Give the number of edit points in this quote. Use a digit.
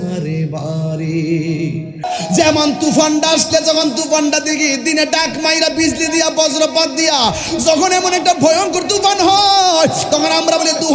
1